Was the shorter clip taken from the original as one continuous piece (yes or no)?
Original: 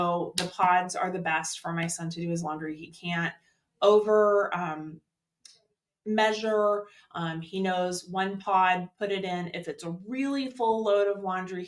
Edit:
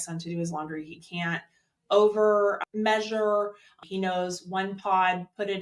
no